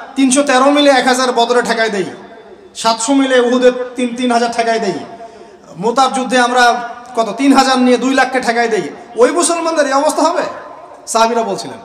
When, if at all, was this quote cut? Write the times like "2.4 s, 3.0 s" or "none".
none